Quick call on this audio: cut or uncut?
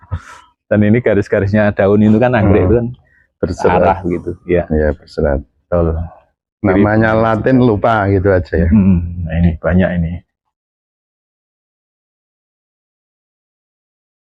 uncut